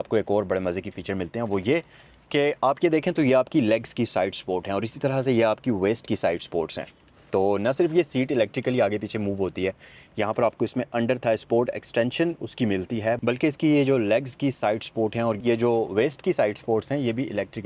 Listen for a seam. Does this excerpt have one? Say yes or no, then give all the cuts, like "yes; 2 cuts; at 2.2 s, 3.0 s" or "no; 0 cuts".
no; 0 cuts